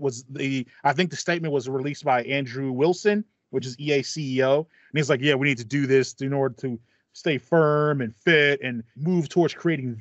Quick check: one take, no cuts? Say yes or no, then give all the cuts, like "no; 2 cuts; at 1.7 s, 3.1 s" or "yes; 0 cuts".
no; 1 cut; at 8.9 s